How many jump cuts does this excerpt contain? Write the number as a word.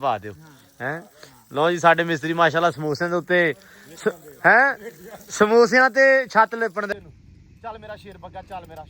one